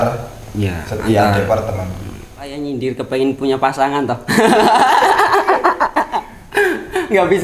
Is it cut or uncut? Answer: cut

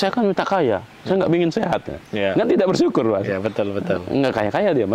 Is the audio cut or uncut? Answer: uncut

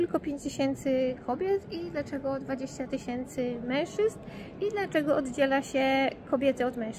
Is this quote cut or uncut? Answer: uncut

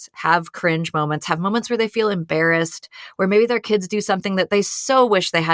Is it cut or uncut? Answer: uncut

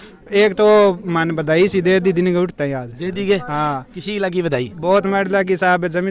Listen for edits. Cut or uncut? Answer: uncut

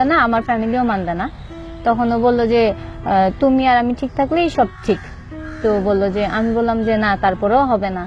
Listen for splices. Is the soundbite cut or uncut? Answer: uncut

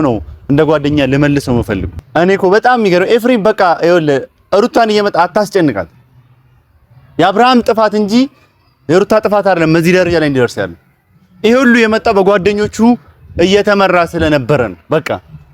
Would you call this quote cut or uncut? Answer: cut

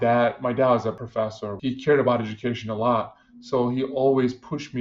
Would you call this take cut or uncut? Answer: cut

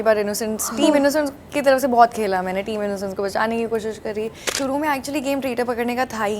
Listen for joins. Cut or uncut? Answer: cut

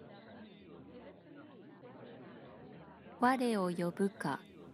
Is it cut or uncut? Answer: uncut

